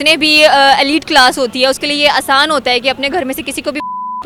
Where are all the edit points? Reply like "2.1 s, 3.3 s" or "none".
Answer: none